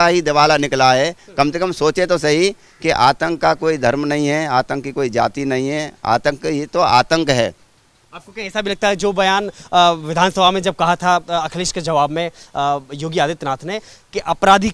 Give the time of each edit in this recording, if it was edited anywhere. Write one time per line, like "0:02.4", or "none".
none